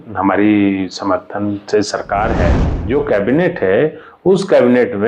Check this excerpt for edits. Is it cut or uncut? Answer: cut